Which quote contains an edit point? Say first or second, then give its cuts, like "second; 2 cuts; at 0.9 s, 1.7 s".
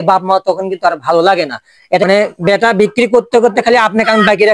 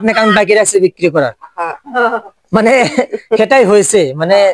first; 1 cut; at 2.1 s